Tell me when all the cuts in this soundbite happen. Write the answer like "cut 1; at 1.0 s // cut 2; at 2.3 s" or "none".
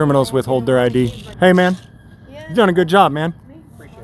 cut 1; at 1.2 s